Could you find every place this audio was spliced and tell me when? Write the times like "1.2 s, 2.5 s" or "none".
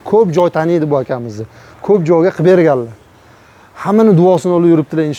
none